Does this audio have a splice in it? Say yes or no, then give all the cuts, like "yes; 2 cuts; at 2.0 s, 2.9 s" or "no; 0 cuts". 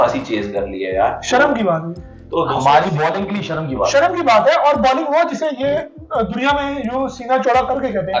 no; 0 cuts